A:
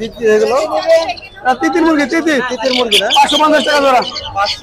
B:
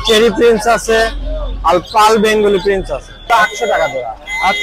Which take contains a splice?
B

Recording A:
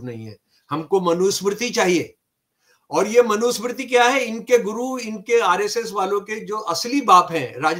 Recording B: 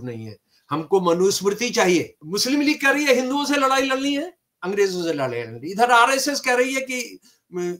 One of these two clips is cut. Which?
B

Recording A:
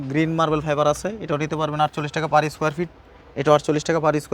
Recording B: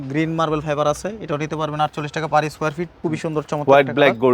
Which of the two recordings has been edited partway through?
B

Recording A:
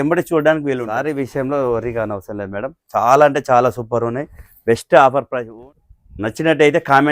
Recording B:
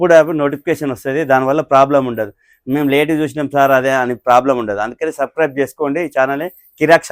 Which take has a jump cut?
A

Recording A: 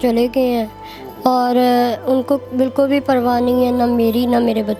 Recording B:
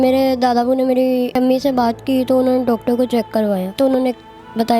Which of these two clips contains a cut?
B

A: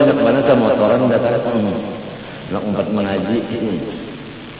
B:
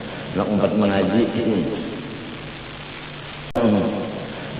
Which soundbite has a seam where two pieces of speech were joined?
B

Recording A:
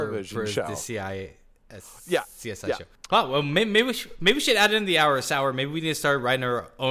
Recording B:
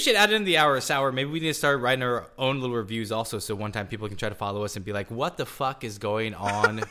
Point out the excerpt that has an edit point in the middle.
A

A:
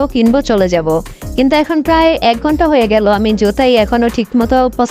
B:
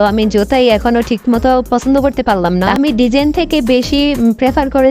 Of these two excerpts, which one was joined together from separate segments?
B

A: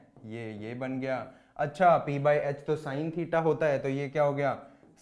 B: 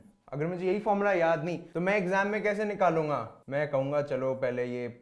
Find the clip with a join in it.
B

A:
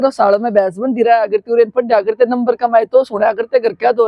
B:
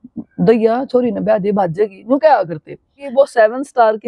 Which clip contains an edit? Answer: B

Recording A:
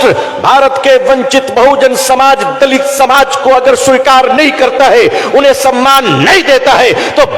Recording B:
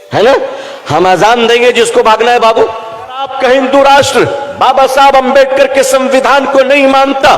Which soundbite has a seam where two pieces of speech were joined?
B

